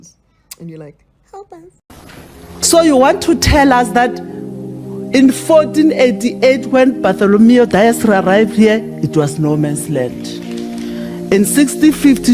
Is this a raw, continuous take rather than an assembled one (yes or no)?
no